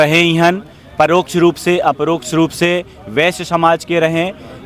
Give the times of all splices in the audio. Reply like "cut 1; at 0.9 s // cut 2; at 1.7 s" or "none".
none

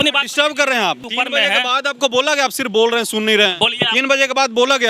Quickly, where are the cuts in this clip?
cut 1; at 1.0 s

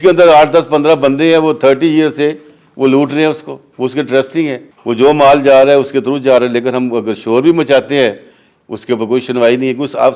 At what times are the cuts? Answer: cut 1; at 4.7 s

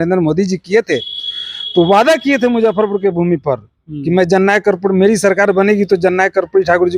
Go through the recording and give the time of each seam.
none

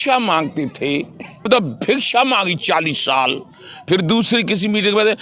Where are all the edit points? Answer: cut 1; at 1.5 s

